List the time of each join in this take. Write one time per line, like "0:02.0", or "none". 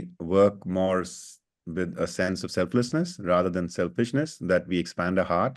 none